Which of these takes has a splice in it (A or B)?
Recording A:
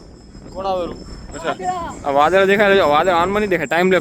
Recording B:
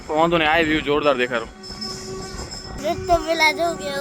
B